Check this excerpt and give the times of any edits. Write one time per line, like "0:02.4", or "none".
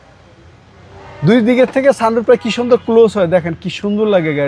none